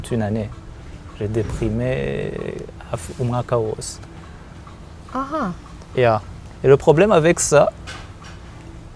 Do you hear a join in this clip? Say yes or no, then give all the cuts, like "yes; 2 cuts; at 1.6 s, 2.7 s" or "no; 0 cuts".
no; 0 cuts